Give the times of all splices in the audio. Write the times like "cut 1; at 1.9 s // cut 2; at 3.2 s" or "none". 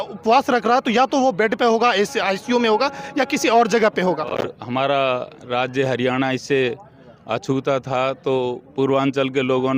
cut 1; at 4.3 s